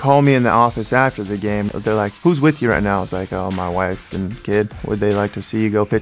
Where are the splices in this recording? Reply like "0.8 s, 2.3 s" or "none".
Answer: 1.7 s, 4.8 s

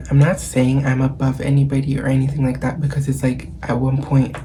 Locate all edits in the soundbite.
none

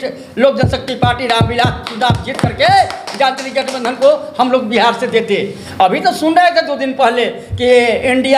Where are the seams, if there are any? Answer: 5.6 s

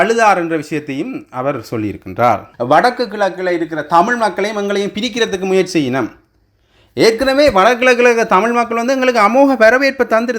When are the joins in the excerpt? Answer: 2.5 s

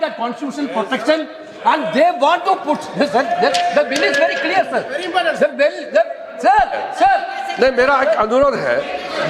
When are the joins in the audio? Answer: none

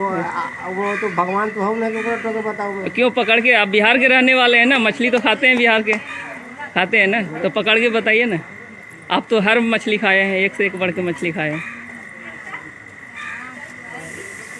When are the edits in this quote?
none

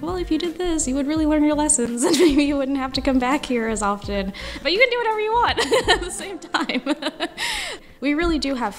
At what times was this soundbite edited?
7.7 s

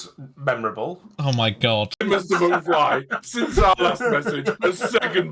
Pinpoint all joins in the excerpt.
2.0 s

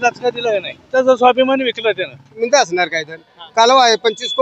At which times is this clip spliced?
0.9 s, 2.4 s, 3.3 s

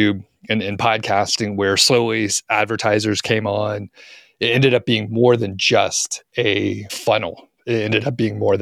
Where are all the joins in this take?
6.9 s

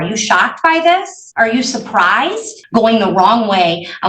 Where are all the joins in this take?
1.2 s, 2.5 s

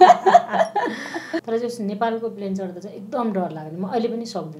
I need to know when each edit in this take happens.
1.3 s

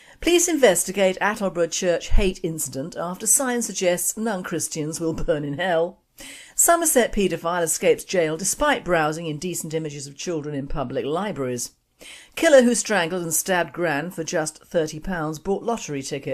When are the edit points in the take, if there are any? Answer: 11.8 s

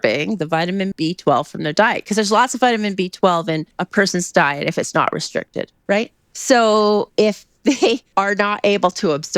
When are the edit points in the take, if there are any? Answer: 0.9 s, 3.8 s, 6.3 s, 8.1 s

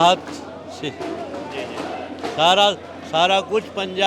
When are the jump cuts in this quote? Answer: none

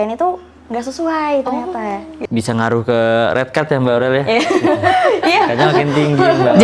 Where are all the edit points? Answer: 2.1 s

